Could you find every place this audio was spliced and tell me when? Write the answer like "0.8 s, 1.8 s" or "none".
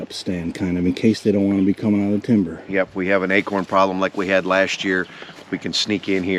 none